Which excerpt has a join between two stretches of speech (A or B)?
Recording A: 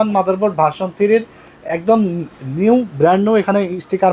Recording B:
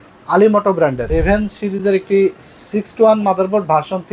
B